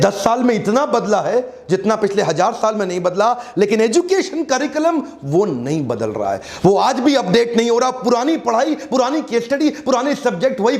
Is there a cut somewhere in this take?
no; 0 cuts

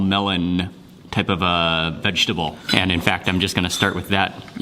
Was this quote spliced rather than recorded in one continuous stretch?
yes; 1 cut; at 2.6 s

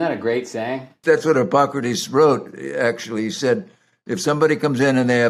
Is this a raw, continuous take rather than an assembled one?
no; 1 cut; at 0.9 s

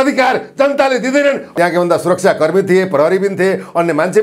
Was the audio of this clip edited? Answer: yes; 1 cut; at 1.5 s

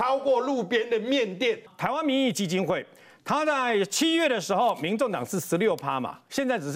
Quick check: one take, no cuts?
no; 1 cut; at 1.7 s

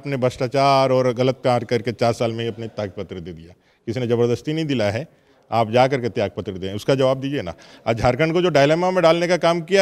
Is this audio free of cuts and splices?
yes; 0 cuts

